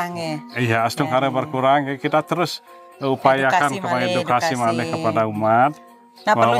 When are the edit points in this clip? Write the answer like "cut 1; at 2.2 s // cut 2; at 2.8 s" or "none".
none